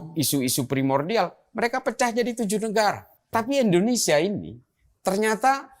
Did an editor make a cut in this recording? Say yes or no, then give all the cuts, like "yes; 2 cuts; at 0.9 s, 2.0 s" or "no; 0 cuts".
yes; 1 cut; at 3.1 s